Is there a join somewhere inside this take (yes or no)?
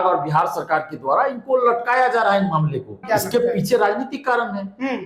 yes